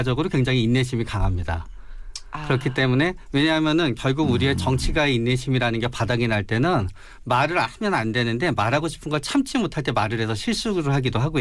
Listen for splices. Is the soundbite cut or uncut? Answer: uncut